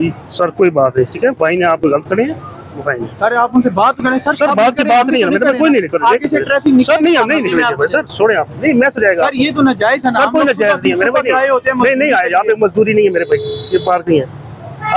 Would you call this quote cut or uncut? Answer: uncut